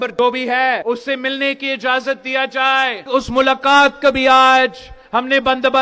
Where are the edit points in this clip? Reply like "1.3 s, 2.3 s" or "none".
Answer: 0.8 s, 3.0 s